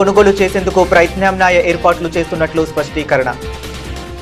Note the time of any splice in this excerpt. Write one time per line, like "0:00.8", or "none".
none